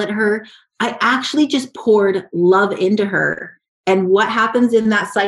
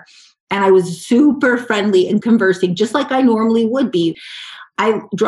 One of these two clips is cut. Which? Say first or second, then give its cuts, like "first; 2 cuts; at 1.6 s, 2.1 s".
second; 2 cuts; at 2.2 s, 4.2 s